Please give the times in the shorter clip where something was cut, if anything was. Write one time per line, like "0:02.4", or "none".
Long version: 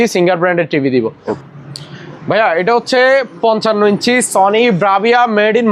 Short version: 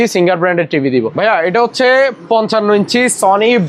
0:01.1